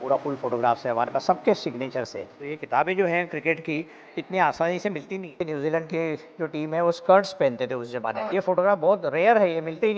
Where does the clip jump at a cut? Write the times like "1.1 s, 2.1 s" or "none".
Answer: 2.5 s, 5.4 s, 8.3 s